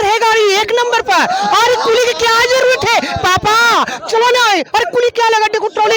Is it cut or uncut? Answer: uncut